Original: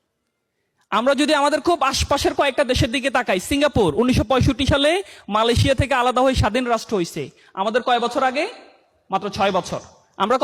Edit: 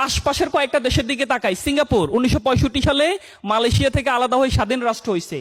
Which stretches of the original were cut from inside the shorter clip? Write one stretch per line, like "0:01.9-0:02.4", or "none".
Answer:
none